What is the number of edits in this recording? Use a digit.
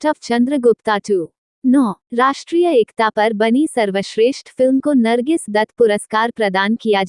1